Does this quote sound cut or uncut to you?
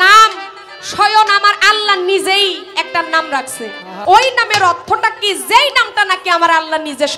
cut